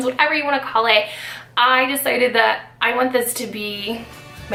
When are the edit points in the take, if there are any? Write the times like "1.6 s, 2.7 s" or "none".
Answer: none